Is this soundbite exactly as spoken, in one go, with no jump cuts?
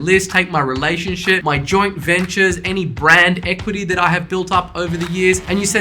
no; 1 cut; at 1.4 s

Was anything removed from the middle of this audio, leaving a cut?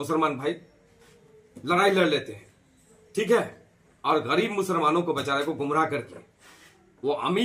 no; 0 cuts

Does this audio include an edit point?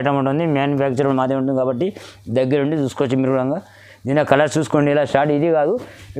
no; 0 cuts

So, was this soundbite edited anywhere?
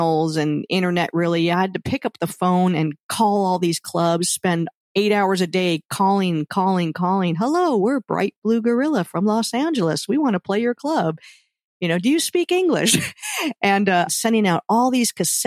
yes; 1 cut; at 14.1 s

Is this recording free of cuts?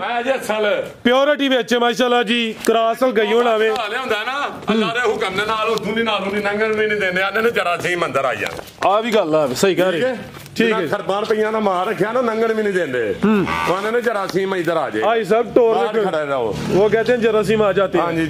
yes; 0 cuts

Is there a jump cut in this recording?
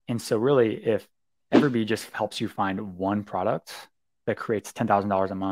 no; 0 cuts

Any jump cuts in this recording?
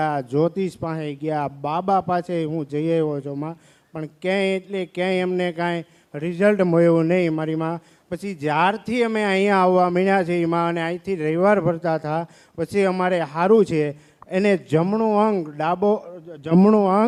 no; 0 cuts

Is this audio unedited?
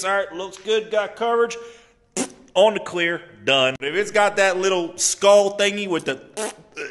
no; 1 cut; at 3.8 s

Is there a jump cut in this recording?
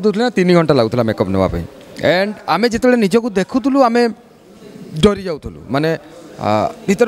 no; 0 cuts

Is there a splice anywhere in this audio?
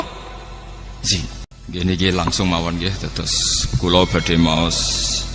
yes; 1 cut; at 1.5 s

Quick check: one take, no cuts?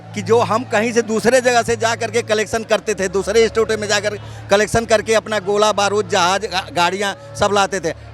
yes; 0 cuts

